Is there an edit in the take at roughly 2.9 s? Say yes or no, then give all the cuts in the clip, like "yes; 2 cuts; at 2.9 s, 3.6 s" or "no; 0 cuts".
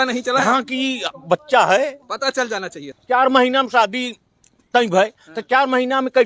yes; 1 cut; at 2.9 s